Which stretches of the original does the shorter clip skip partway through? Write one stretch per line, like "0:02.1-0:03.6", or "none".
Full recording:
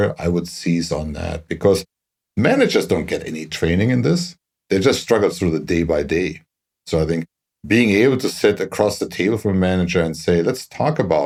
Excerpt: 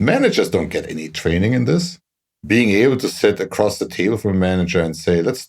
0:04.5-0:07.3